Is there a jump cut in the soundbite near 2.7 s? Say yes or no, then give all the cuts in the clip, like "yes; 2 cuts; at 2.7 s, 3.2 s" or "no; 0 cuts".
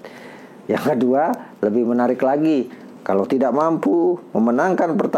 yes; 1 cut; at 2.7 s